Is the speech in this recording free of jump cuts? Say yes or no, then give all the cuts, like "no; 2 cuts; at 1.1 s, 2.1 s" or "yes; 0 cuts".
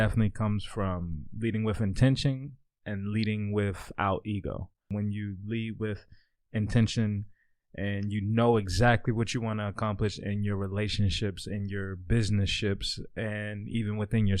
yes; 0 cuts